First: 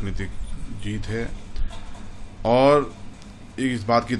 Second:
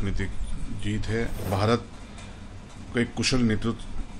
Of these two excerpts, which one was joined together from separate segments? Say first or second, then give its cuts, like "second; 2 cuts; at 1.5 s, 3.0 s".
second; 1 cut; at 1.5 s